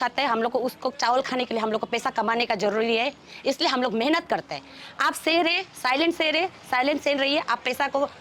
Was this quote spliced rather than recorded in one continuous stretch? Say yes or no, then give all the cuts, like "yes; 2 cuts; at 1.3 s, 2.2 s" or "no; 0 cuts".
no; 0 cuts